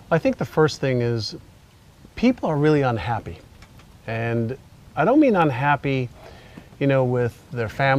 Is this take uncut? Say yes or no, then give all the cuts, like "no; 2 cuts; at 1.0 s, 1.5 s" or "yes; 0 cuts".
no; 1 cut; at 3.4 s